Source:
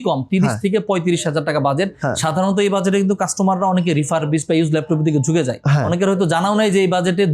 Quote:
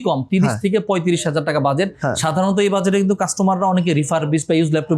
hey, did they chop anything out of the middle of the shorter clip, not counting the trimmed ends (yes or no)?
no